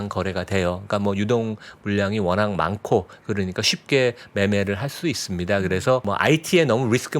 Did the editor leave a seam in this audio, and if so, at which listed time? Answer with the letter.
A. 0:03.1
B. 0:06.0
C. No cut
B